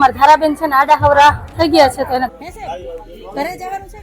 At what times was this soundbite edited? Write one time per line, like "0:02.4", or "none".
0:02.3